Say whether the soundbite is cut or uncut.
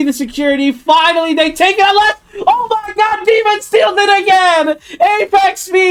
uncut